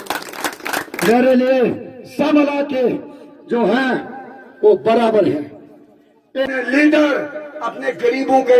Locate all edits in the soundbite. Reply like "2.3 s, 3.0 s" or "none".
6.5 s